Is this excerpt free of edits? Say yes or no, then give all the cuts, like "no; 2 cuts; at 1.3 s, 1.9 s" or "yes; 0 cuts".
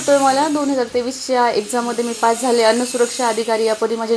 yes; 0 cuts